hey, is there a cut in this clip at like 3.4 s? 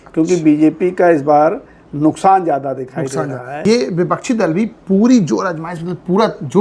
yes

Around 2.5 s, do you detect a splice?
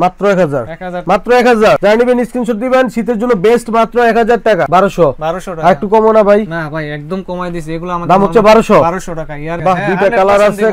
no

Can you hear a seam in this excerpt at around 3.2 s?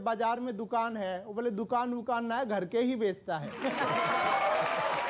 no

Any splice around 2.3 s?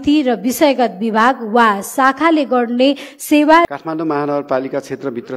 no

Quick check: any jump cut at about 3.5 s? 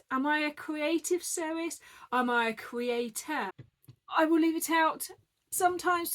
yes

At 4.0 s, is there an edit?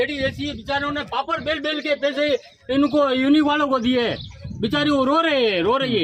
no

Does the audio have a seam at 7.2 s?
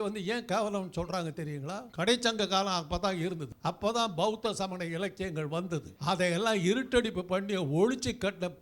no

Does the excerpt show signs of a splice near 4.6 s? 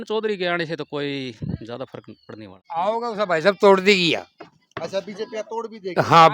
no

